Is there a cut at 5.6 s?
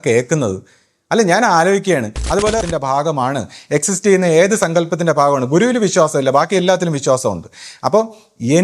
no; 1 cut; at 2.6 s

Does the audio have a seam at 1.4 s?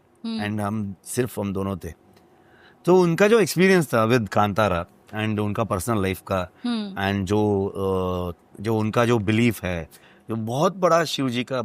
no; 0 cuts

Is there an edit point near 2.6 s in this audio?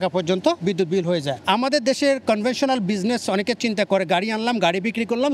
no; 1 cut; at 1.0 s

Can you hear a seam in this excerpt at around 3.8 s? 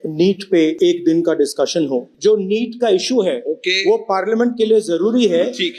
no; 2 cuts; at 0.8 s, 2.1 s

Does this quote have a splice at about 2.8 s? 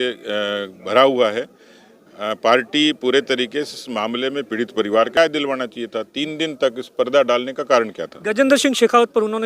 no; 1 cut; at 5.1 s

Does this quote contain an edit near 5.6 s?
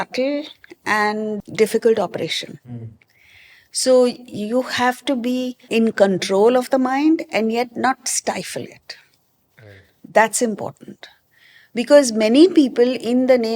yes; 2 cuts; at 1.3 s, 5.6 s

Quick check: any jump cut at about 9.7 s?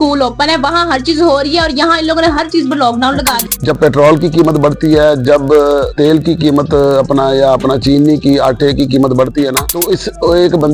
yes; 3 cuts; at 3.3 s, 5.9 s, 9.7 s

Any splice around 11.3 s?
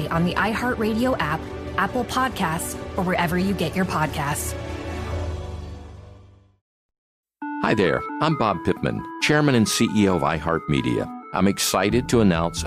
no; 1 cut; at 6.6 s

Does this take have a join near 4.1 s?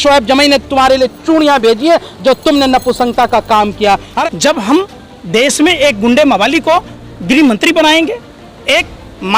yes; 1 cut; at 4.1 s

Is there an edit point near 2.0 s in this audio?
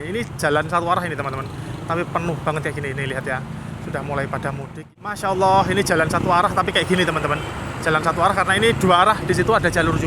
no; 1 cut; at 5.2 s

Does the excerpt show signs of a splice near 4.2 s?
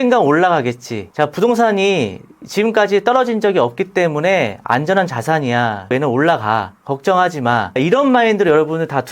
no; 2 cuts; at 5.9 s, 7.8 s

